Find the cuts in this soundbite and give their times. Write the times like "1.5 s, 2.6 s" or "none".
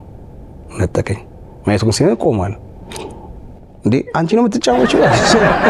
none